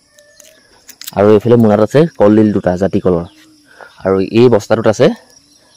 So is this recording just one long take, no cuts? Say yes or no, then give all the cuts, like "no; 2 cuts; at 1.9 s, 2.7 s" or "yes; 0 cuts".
yes; 0 cuts